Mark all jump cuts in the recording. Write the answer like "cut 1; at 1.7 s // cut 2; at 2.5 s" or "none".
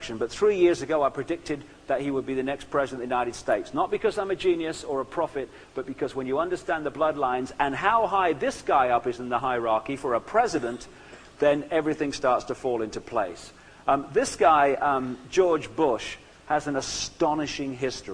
cut 1; at 7.5 s